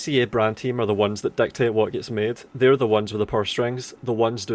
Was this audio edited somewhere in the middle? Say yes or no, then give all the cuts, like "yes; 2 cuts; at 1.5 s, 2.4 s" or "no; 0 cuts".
no; 0 cuts